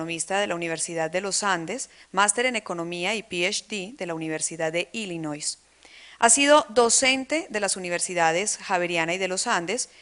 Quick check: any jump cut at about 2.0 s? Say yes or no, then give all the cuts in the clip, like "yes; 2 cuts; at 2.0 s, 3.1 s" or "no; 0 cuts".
no; 1 cut; at 6.0 s